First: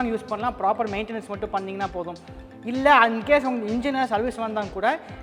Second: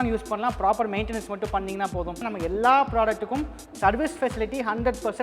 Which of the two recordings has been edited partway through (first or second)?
second